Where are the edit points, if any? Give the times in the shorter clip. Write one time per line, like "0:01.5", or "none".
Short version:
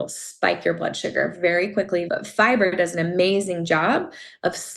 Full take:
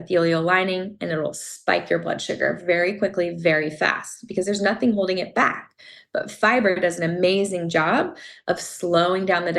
0:02.1